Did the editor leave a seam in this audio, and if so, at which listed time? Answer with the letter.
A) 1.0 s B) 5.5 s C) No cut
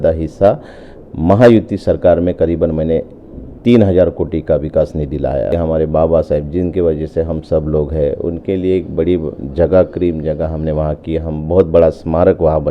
B